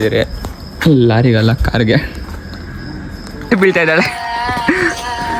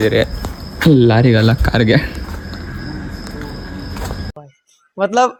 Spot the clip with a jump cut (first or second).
first